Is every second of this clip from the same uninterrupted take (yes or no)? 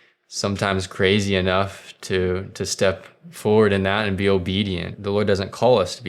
no